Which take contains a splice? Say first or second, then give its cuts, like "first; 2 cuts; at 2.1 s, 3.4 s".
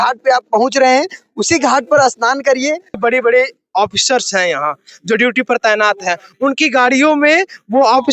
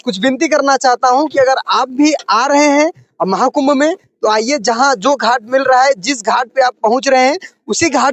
first; 1 cut; at 3.0 s